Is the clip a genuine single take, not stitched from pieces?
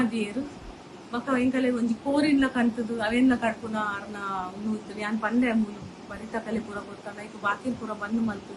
yes; 0 cuts

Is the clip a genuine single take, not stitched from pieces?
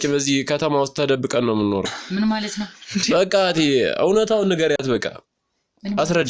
yes; 0 cuts

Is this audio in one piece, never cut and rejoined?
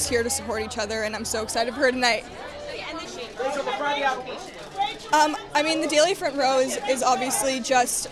yes; 0 cuts

